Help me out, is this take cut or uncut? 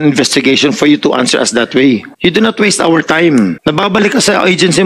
cut